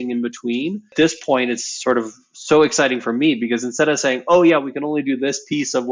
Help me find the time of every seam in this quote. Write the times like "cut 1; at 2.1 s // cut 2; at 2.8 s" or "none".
cut 1; at 0.9 s